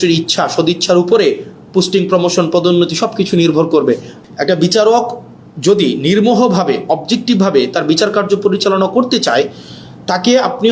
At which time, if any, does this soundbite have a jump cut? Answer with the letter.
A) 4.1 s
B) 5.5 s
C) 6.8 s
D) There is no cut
A